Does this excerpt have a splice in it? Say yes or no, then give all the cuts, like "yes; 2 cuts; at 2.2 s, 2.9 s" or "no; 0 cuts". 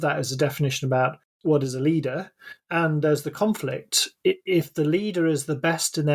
yes; 2 cuts; at 1.3 s, 2.4 s